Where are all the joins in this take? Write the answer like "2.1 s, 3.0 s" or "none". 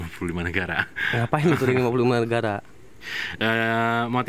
none